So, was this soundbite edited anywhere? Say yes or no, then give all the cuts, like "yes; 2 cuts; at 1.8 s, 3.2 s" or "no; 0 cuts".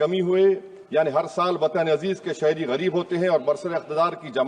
no; 0 cuts